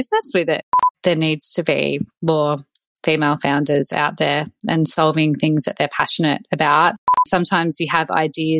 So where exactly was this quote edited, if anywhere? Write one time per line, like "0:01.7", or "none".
0:00.9
0:07.1